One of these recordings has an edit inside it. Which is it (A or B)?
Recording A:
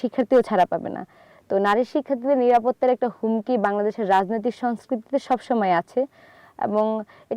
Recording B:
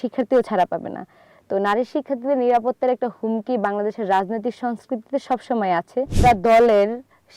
B